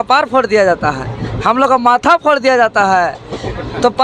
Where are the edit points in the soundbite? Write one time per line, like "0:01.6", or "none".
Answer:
none